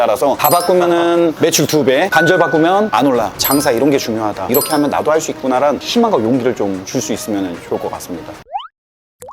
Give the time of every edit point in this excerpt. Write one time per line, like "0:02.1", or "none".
0:03.4
0:08.4